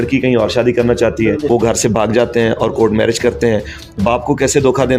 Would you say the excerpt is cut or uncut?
cut